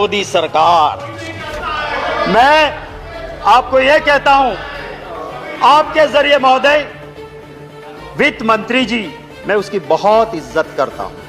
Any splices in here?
no; 0 cuts

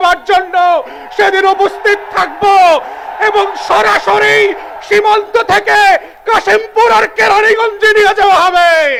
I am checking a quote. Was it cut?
no; 0 cuts

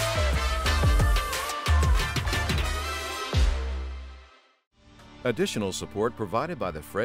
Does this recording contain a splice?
yes; 1 cut; at 5.1 s

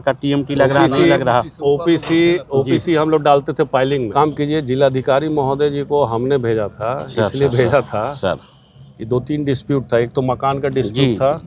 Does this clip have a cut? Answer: yes; 1 cut; at 4.1 s

